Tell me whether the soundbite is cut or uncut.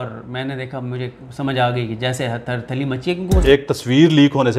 cut